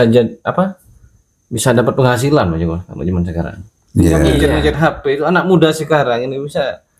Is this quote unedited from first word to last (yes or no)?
yes